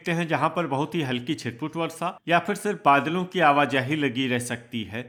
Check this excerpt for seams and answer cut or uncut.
uncut